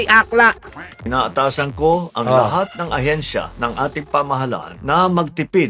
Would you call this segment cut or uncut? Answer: cut